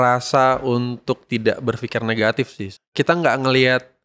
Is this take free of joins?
no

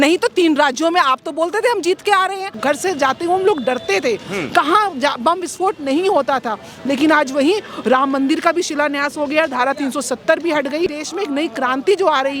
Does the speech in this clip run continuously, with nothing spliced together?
no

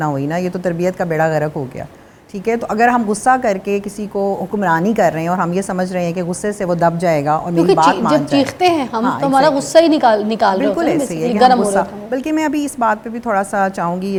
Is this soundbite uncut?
yes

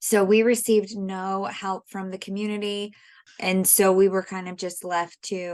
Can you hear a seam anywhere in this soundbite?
yes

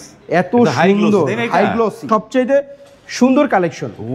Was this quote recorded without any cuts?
no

